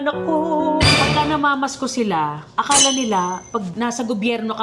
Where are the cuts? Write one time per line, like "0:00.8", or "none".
0:00.9
0:03.7